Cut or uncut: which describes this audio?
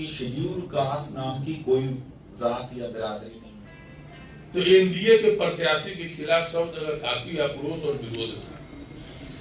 cut